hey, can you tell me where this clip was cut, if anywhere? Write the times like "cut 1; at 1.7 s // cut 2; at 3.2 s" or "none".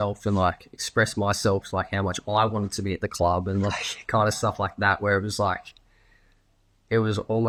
none